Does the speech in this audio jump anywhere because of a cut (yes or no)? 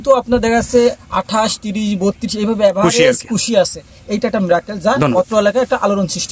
no